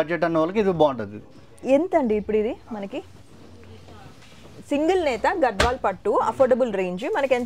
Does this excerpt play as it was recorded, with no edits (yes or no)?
yes